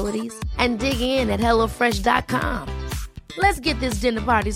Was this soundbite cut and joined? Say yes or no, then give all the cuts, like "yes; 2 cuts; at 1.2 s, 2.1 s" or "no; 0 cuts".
no; 0 cuts